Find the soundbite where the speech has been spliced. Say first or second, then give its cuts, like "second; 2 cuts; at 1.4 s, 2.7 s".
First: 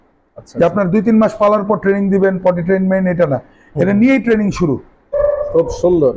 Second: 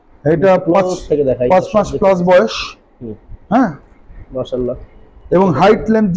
first; 1 cut; at 5.1 s